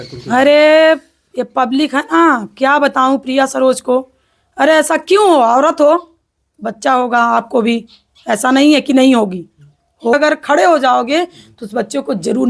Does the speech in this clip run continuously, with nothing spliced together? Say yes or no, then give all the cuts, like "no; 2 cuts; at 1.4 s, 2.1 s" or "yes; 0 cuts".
no; 1 cut; at 10.1 s